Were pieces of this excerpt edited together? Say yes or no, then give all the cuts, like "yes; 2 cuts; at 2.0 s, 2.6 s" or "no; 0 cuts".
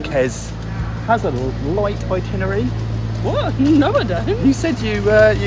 no; 0 cuts